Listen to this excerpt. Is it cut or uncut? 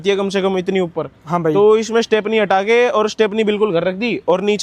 uncut